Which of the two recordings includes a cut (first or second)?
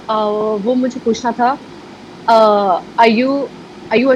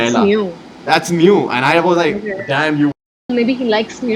second